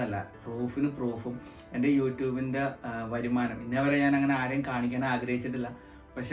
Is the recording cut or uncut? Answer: uncut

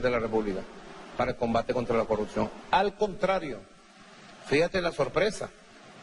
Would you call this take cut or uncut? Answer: cut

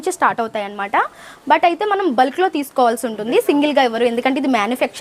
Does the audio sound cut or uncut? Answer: uncut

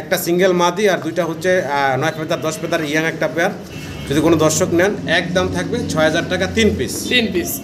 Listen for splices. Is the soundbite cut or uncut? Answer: uncut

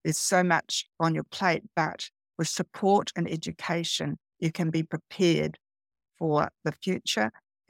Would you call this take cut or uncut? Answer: uncut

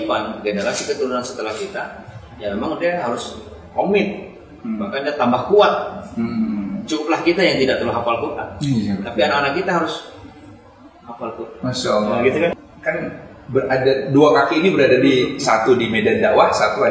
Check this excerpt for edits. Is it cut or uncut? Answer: cut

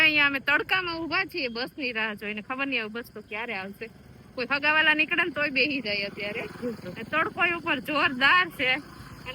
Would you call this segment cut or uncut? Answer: uncut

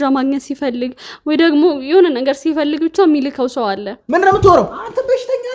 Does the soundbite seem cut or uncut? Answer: cut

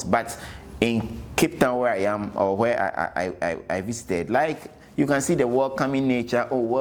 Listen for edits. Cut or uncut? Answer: uncut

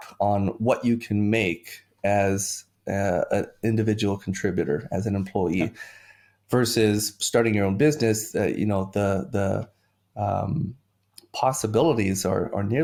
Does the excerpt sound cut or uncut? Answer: uncut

